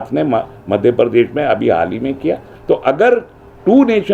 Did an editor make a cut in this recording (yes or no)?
yes